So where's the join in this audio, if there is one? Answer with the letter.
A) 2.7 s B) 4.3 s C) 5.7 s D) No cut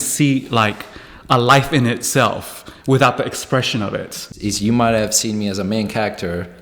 B